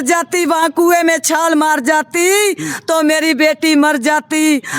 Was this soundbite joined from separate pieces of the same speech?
no; 0 cuts

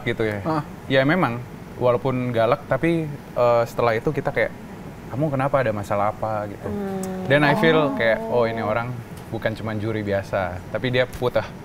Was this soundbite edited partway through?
no; 0 cuts

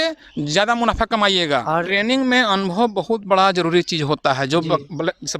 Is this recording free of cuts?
no; 1 cut; at 1.6 s

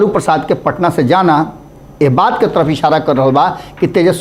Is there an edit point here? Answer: no; 0 cuts

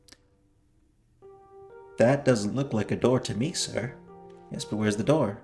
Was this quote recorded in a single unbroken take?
yes; 0 cuts

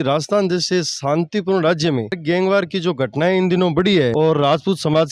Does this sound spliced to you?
yes; 2 cuts; at 2.2 s, 4.1 s

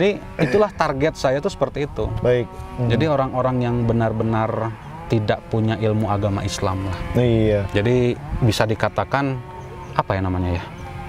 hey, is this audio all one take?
yes; 0 cuts

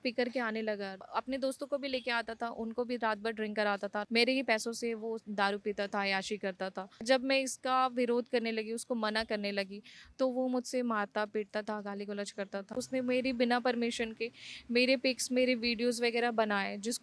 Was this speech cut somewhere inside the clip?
yes; 4 cuts; at 1.0 s, 4.0 s, 7.0 s, 12.8 s

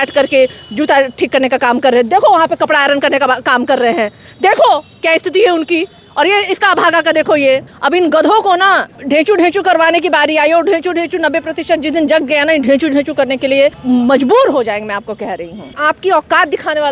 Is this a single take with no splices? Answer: no; 4 cuts; at 7.7 s, 8.9 s, 13.8 s, 15.7 s

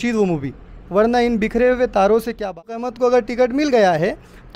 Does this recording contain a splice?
yes; 1 cut; at 2.8 s

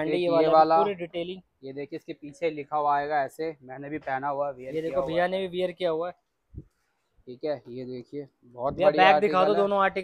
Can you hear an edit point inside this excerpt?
no; 0 cuts

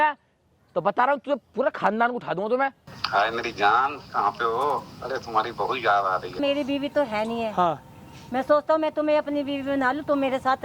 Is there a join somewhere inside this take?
yes; 2 cuts; at 2.9 s, 6.4 s

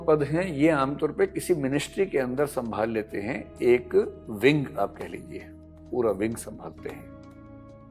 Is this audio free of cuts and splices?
no; 1 cut; at 7.0 s

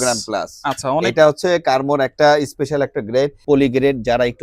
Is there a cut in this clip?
yes; 1 cut; at 3.4 s

